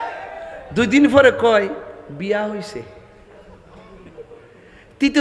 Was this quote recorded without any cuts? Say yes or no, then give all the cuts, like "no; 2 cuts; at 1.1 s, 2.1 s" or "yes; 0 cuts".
yes; 0 cuts